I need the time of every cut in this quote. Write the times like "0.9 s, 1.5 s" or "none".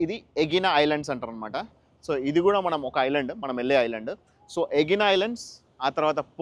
none